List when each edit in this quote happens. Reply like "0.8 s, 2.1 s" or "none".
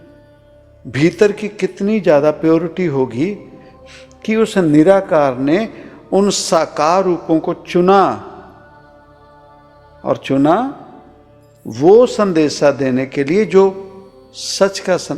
none